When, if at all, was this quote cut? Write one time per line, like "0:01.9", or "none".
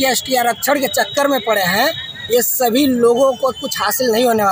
none